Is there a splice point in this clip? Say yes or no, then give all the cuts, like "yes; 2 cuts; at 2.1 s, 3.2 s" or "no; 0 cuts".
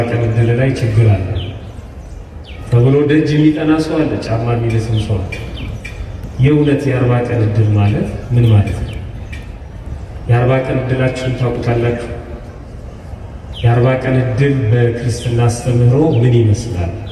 no; 0 cuts